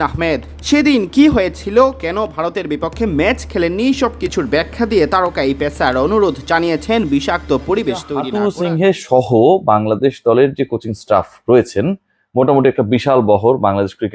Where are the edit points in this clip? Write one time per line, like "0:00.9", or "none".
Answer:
0:08.2